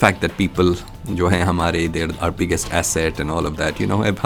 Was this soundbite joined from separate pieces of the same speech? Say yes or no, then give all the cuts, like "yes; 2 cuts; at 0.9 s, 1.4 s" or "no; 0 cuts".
no; 0 cuts